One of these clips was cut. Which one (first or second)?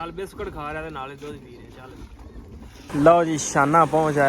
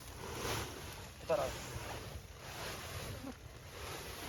first